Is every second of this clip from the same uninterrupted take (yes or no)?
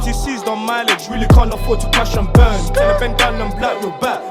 yes